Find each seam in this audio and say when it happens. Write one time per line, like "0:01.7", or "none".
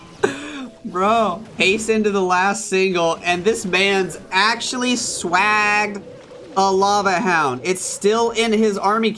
0:01.5